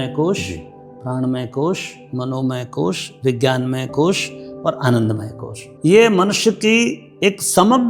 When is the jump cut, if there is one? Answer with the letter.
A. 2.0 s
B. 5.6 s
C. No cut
B